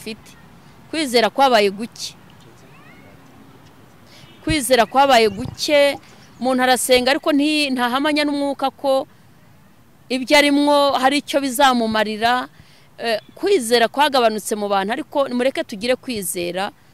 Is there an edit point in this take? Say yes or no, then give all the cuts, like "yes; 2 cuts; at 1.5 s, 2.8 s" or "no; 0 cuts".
no; 0 cuts